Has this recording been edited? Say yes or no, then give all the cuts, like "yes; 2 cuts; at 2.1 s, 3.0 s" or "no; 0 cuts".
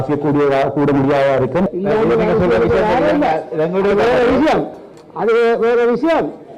yes; 1 cut; at 1.7 s